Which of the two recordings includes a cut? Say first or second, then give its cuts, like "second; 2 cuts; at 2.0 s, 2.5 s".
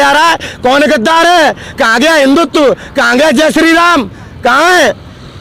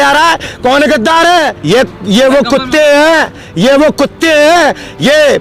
second; 1 cut; at 1.6 s